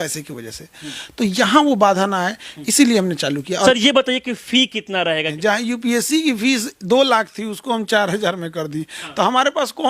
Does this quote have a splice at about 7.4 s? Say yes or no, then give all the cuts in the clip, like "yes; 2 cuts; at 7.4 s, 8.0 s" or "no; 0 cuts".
no; 2 cuts; at 3.7 s, 5.3 s